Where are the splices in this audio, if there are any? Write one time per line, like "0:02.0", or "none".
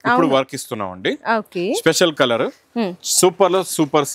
none